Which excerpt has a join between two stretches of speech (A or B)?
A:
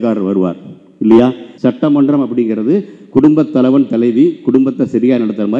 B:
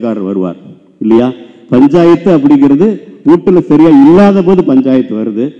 A